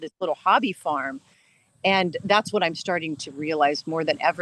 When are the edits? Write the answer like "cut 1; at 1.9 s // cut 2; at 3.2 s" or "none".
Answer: none

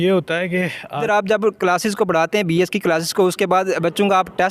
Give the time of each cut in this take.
cut 1; at 1.0 s

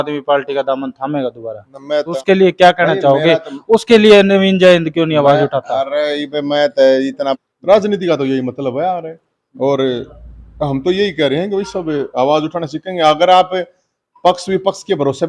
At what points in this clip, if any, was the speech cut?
cut 1; at 2.1 s // cut 2; at 7.4 s

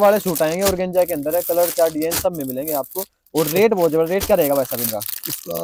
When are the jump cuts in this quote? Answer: none

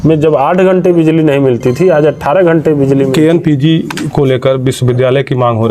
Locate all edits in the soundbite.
cut 1; at 3.1 s

